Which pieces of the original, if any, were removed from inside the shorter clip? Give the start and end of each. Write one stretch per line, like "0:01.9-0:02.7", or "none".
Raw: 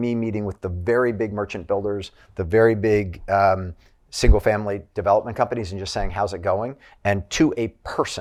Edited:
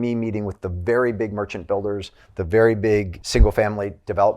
0:03.2-0:04.0